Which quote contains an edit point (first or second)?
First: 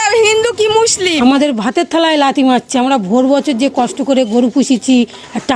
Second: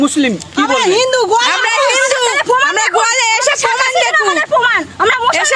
first